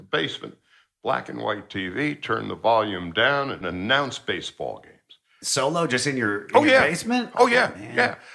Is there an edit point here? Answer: yes; 2 cuts; at 3.6 s, 5.3 s

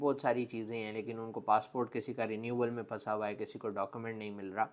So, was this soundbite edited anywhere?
no; 0 cuts

